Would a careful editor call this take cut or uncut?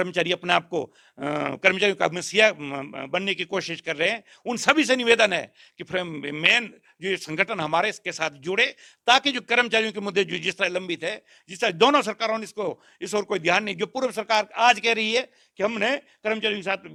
uncut